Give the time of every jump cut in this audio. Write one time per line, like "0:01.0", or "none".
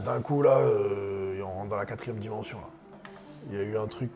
0:03.0